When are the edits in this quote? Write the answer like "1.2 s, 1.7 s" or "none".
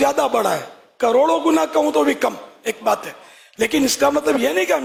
none